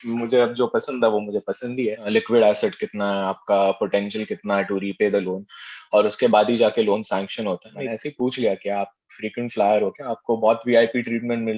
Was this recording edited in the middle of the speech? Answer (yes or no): yes